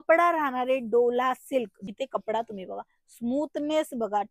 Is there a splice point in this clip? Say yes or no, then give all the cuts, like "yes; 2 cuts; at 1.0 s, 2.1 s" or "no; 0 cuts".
yes; 1 cut; at 1.8 s